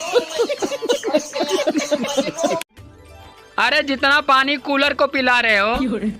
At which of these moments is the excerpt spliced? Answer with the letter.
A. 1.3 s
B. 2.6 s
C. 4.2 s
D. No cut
B